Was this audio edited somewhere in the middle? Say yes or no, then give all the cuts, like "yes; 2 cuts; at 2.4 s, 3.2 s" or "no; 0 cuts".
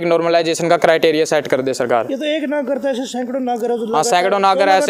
no; 0 cuts